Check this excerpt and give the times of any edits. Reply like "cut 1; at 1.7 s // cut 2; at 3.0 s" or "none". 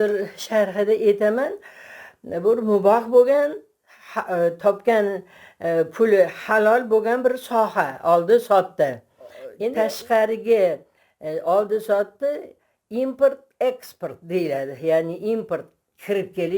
cut 1; at 9.7 s